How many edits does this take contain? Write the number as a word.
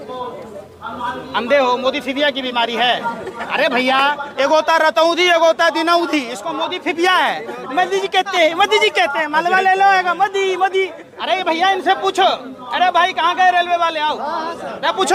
zero